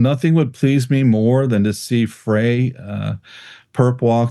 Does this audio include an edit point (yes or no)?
no